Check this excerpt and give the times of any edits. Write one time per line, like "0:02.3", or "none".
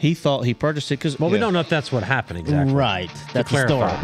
0:01.2